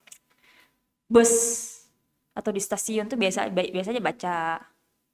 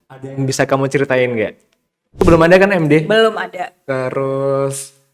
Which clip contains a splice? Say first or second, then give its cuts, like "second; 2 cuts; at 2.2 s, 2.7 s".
second; 1 cut; at 2.2 s